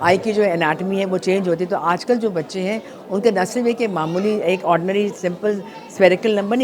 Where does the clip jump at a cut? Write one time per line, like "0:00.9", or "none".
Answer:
none